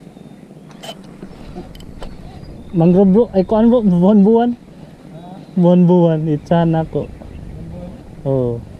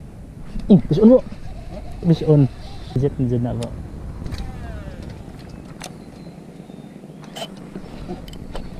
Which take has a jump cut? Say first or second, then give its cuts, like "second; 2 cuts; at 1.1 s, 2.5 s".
second; 1 cut; at 3.0 s